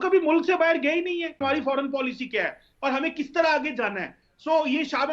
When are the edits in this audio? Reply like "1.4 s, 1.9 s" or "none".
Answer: 1.4 s